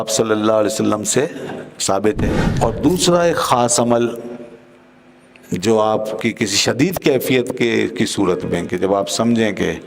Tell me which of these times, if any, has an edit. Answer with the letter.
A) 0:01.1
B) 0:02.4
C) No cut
B